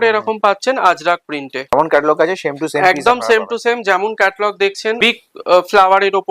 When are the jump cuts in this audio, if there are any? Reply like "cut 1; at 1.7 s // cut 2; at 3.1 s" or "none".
cut 1; at 1.7 s // cut 2; at 5.0 s